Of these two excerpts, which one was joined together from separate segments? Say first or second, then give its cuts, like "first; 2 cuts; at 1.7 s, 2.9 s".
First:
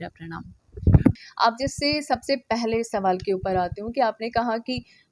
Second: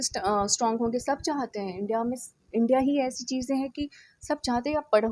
first; 1 cut; at 1.1 s